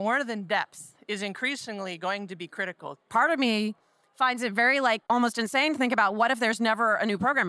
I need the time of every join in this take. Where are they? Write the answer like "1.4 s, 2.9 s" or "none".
3.1 s